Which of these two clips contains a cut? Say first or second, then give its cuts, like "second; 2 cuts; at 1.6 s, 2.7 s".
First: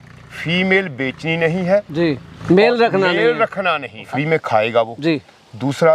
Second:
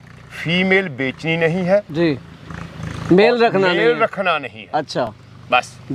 first; 2 cuts; at 2.3 s, 4.1 s